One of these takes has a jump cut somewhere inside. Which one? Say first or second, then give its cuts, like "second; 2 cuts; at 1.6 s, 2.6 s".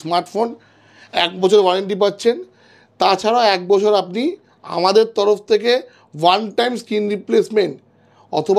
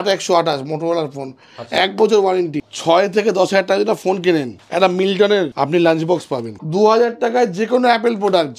second; 4 cuts; at 2.6 s, 4.6 s, 5.5 s, 6.6 s